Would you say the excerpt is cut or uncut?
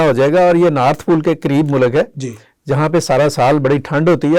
uncut